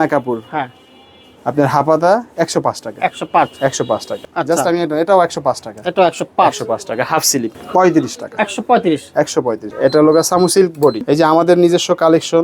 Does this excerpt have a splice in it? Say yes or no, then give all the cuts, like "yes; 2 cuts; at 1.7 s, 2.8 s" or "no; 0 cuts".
yes; 4 cuts; at 4.3 s, 7.6 s, 9.7 s, 11.0 s